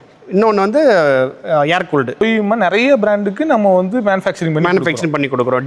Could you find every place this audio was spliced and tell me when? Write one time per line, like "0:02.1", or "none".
0:02.2